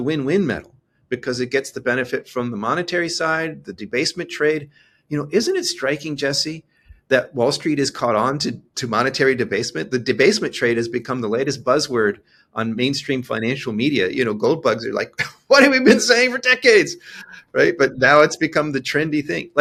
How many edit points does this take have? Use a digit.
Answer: 0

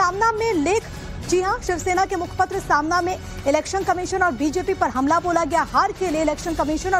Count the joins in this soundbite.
1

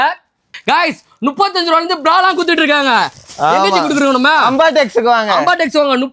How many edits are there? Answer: 0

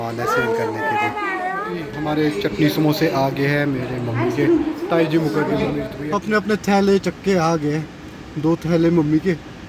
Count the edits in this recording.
2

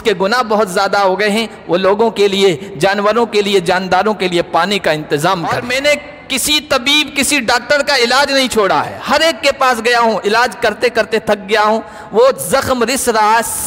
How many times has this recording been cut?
1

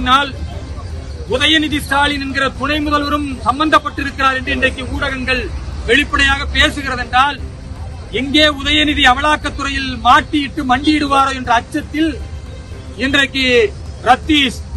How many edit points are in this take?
0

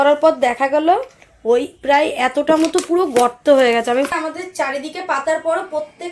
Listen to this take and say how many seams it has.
1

